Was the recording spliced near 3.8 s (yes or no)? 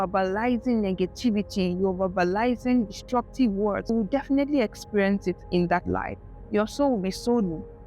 yes